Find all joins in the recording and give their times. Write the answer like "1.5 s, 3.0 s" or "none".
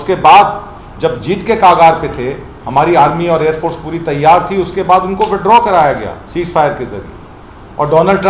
none